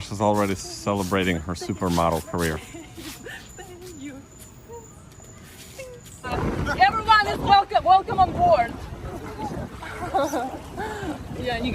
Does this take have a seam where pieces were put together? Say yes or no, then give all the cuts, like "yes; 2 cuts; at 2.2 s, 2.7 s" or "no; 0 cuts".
yes; 1 cut; at 6.3 s